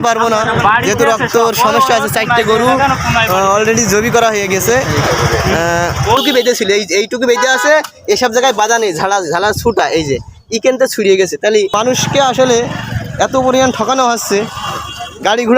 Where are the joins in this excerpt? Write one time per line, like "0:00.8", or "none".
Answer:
0:06.2
0:11.7